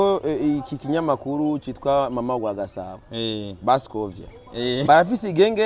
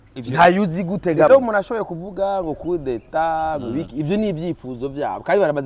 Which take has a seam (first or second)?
second